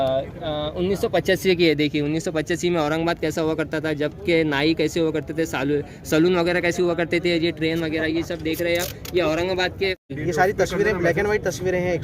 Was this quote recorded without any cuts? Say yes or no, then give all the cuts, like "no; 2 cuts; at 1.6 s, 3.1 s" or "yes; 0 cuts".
no; 1 cut; at 10.1 s